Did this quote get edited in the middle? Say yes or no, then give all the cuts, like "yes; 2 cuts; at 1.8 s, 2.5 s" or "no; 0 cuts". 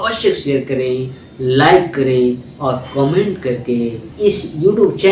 no; 0 cuts